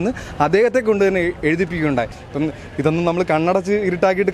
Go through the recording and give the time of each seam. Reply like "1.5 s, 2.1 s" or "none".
2.2 s